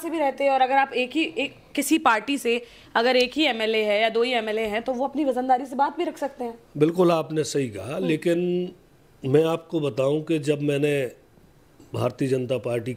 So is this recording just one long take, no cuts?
yes; 0 cuts

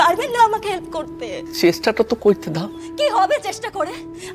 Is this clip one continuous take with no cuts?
no; 1 cut; at 1.5 s

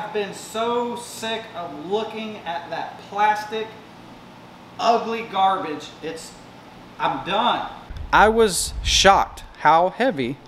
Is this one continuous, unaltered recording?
no; 1 cut; at 7.9 s

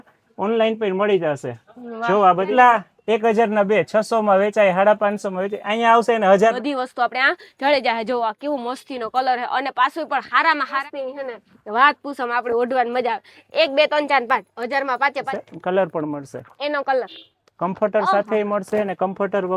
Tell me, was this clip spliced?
yes; 4 cuts; at 2.5 s, 6.6 s, 10.8 s, 15.3 s

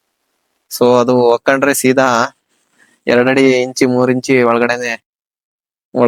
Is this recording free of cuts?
yes; 0 cuts

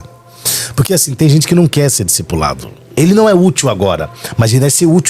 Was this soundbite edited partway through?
yes; 1 cut; at 2.8 s

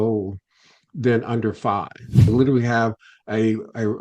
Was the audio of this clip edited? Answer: yes; 1 cut; at 2.3 s

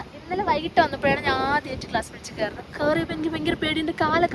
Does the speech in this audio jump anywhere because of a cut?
no; 0 cuts

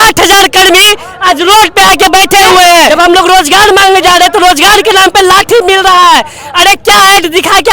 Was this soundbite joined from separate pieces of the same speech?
yes; 1 cut; at 2.9 s

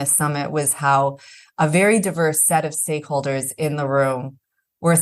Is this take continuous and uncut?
yes; 0 cuts

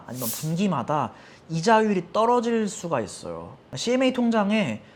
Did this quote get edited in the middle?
no; 0 cuts

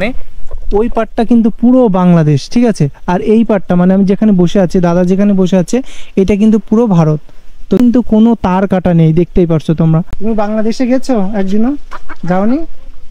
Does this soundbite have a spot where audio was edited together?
yes; 2 cuts; at 7.8 s, 10.1 s

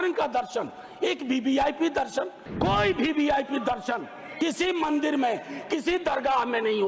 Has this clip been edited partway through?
yes; 1 cut; at 2.4 s

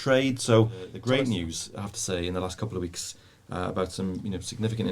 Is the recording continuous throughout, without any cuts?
no; 1 cut; at 0.9 s

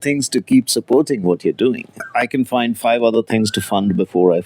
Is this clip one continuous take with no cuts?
no; 1 cut; at 1.9 s

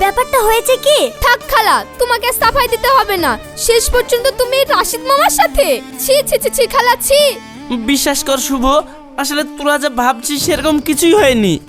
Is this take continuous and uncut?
yes; 0 cuts

